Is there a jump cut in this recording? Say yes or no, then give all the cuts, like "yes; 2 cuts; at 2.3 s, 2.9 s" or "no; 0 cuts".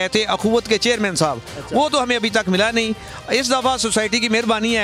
no; 0 cuts